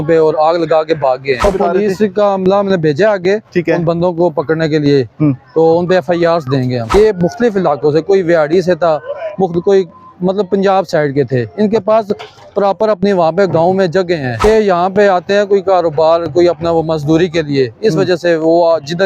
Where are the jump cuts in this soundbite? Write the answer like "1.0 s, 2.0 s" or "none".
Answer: 1.4 s, 6.9 s, 14.4 s

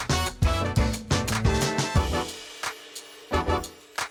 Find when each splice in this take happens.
none

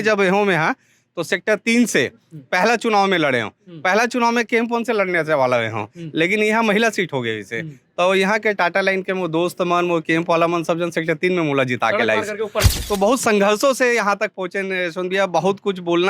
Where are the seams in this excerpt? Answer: 12.7 s

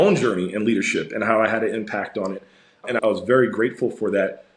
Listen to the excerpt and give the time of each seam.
2.9 s

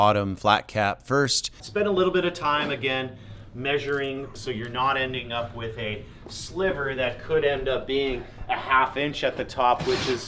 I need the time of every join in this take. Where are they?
1.6 s, 4.3 s

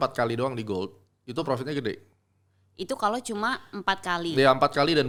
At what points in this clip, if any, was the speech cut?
none

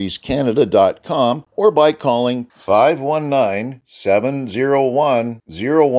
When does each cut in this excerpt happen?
1.5 s

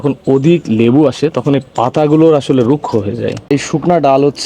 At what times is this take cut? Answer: 3.4 s

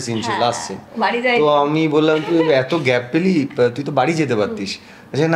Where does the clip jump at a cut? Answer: none

